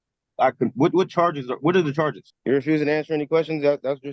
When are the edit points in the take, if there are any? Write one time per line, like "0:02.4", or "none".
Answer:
0:02.3